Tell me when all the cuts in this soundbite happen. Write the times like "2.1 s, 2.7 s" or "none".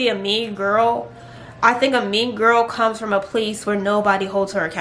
none